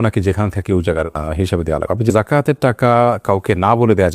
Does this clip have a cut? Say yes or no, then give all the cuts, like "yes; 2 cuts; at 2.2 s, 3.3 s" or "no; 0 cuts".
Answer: yes; 1 cut; at 2.1 s